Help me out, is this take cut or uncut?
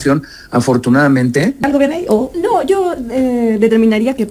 cut